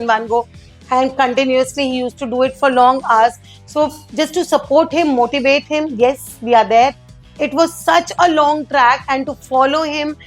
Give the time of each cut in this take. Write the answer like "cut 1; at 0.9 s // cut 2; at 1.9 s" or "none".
cut 1; at 7.0 s